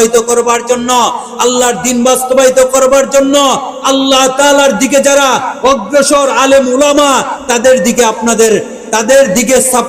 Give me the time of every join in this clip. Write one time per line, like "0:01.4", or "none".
none